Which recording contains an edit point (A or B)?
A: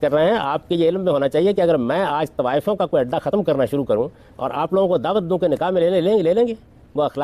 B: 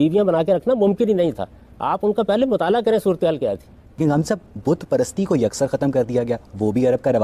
B